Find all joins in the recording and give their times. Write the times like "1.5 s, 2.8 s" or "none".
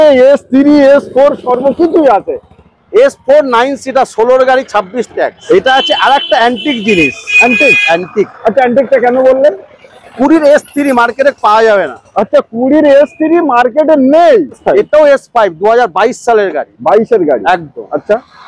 5.4 s, 14.6 s